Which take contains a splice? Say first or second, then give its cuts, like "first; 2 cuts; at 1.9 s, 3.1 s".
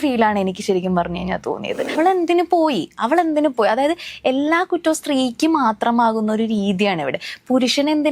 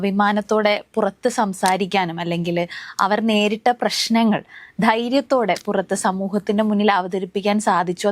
first; 1 cut; at 1.9 s